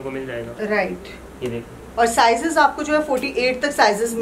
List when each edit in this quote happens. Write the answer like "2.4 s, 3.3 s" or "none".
none